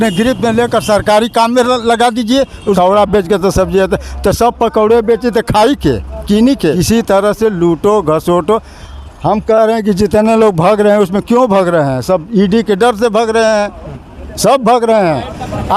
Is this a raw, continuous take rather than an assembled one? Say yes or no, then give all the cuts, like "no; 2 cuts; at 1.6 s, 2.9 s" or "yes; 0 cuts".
no; 2 cuts; at 2.8 s, 6.8 s